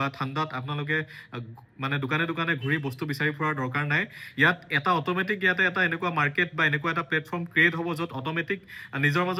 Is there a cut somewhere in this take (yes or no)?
no